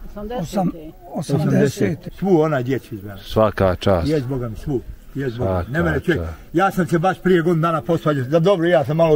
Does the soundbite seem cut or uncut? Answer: cut